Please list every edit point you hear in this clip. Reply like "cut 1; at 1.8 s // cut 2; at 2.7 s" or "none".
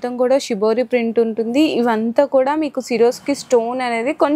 none

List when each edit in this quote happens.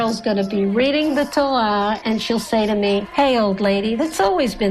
cut 1; at 2.0 s // cut 2; at 3.1 s

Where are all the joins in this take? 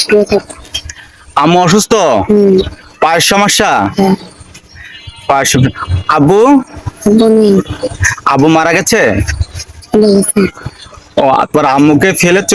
none

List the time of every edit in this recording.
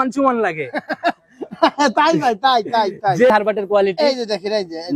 cut 1; at 3.3 s

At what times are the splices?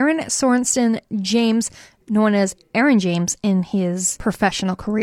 cut 1; at 4.1 s

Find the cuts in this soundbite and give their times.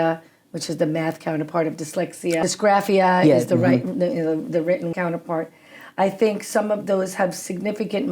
cut 1; at 2.4 s // cut 2; at 4.9 s

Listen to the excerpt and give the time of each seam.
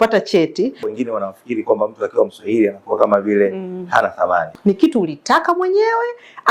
cut 1; at 0.9 s // cut 2; at 4.5 s

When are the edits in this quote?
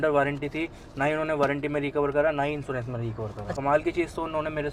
none

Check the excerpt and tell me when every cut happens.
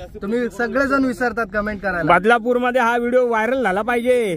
none

